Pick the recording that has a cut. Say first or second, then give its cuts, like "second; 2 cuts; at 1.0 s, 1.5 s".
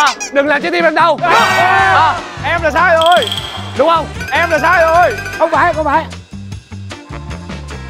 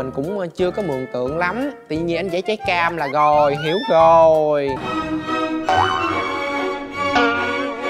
second; 1 cut; at 4.8 s